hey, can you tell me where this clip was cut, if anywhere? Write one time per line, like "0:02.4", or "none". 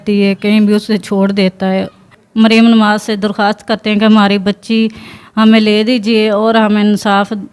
0:02.2